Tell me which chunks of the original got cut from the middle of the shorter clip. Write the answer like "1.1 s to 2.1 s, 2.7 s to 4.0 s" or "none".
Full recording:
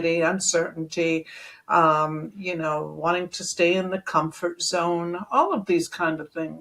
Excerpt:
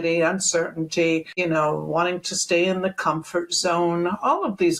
1.3 s to 2.4 s